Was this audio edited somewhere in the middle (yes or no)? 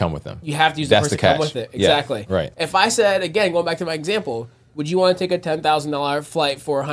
yes